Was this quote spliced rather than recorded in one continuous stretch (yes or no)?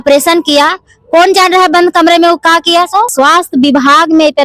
yes